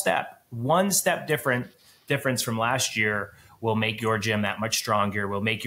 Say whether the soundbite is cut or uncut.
uncut